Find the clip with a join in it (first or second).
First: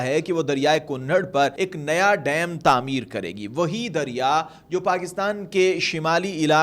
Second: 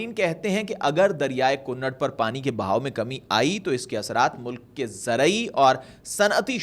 first